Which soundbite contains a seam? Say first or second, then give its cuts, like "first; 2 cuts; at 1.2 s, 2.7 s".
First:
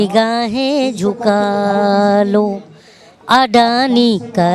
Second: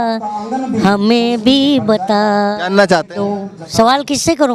second; 1 cut; at 3.6 s